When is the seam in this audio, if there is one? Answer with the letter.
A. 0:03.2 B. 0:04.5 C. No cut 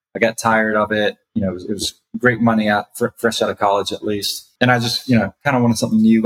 B